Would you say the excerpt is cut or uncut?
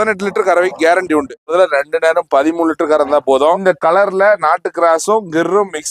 cut